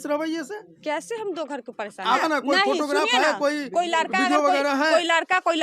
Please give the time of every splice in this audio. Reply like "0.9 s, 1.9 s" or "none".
2.2 s